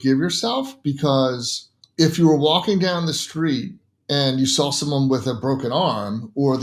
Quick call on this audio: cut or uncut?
uncut